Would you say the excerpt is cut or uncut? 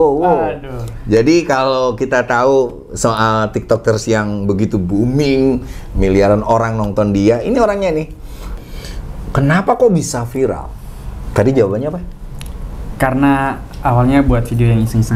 cut